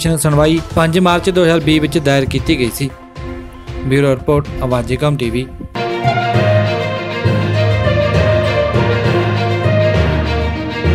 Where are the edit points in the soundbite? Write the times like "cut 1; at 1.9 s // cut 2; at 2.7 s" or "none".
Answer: cut 1; at 5.7 s